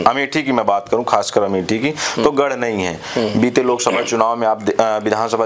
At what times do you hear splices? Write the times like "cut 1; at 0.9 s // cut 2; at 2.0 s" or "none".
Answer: none